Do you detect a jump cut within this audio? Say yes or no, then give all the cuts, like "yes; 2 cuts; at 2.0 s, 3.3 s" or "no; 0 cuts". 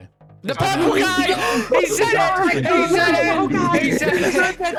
no; 0 cuts